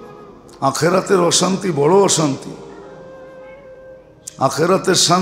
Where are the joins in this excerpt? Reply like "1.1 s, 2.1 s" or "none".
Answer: 2.9 s, 4.1 s